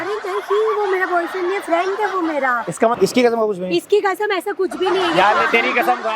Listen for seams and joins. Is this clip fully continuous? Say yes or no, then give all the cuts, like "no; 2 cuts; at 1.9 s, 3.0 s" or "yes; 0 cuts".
no; 1 cut; at 2.9 s